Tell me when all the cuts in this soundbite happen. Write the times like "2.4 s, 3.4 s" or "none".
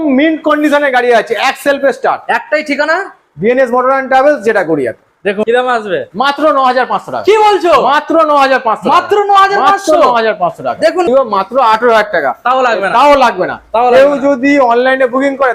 5.4 s, 11.1 s